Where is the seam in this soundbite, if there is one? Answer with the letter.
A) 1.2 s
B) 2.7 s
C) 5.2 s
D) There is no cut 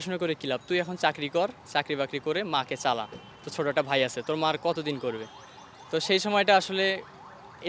D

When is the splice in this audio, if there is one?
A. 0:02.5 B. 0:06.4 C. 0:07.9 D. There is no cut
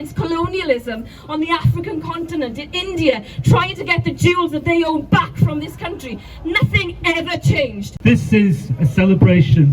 C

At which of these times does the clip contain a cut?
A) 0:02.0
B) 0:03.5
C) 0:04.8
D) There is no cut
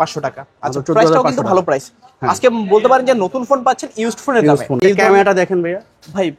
C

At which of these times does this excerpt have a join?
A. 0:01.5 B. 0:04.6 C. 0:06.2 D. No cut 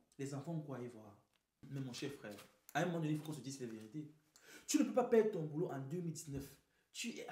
A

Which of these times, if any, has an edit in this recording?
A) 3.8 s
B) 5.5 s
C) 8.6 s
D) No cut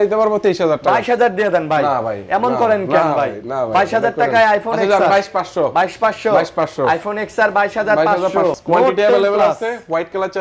C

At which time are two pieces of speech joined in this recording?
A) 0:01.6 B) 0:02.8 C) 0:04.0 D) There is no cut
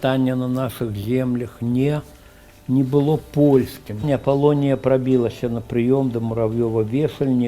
C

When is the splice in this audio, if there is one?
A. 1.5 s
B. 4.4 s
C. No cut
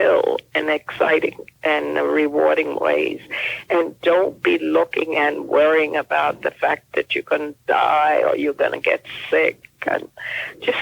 A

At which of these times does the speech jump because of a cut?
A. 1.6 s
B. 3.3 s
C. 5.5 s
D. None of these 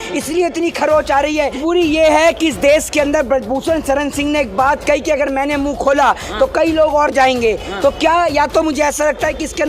A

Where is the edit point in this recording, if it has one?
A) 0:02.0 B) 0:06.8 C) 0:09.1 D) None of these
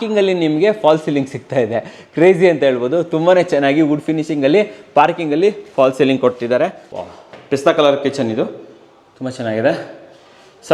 B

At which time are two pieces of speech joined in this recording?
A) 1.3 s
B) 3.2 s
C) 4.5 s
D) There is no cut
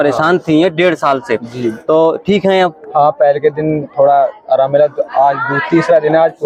D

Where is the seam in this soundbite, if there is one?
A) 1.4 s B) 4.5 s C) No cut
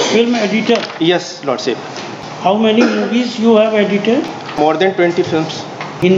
B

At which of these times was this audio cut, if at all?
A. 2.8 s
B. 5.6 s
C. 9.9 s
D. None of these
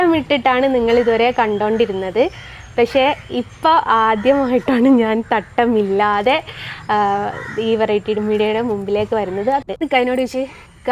C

